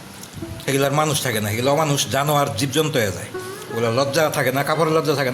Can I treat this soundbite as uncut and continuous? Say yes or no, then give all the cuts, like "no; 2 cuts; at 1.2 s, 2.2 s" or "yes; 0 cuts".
yes; 0 cuts